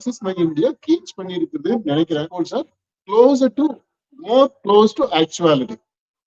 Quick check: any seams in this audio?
yes; 1 cut; at 2.3 s

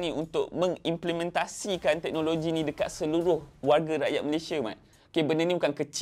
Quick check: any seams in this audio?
no; 0 cuts

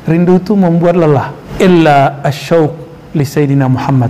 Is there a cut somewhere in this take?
yes; 1 cut; at 1.4 s

